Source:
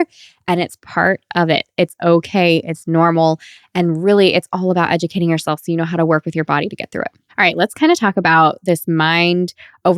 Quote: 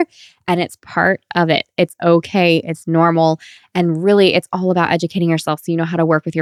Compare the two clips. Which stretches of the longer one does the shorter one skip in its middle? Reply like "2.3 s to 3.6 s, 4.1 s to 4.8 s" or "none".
none